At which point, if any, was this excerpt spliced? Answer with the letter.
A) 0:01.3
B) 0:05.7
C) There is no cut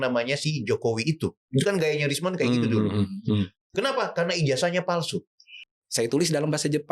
B